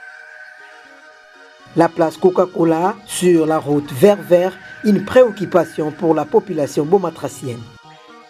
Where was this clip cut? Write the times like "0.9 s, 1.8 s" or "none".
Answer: none